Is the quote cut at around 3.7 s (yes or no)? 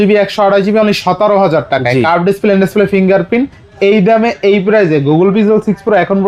no